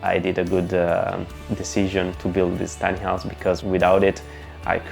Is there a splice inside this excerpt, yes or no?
yes